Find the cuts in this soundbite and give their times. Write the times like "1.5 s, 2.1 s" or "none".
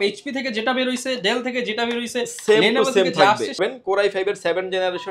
3.6 s